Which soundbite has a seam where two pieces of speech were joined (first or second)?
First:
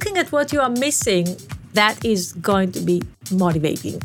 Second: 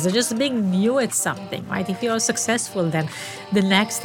first